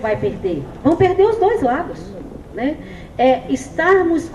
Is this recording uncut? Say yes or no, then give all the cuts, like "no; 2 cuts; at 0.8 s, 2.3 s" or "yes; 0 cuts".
yes; 0 cuts